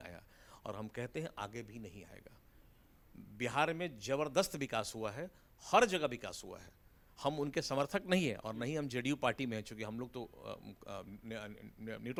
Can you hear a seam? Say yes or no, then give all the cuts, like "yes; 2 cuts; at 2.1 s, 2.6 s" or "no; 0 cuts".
no; 0 cuts